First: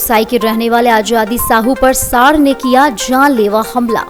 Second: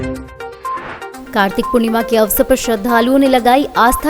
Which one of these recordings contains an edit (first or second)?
second